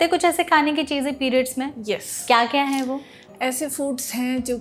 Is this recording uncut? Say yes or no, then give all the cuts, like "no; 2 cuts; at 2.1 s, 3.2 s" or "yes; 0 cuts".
yes; 0 cuts